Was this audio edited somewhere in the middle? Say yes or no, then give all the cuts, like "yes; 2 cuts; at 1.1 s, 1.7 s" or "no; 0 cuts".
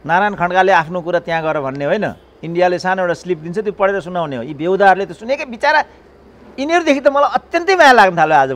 no; 0 cuts